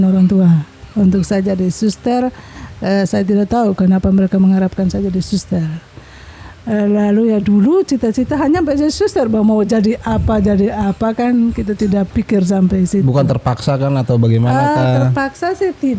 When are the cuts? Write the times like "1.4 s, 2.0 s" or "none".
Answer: none